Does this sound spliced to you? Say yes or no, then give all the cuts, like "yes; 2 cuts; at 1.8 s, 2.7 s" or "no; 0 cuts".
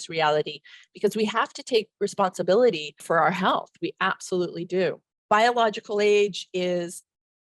yes; 2 cuts; at 2.9 s, 5.1 s